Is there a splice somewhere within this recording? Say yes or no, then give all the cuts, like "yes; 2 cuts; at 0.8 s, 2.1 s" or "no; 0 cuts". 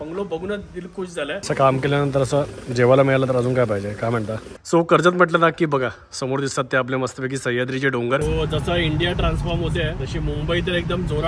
yes; 3 cuts; at 1.4 s, 4.5 s, 8.2 s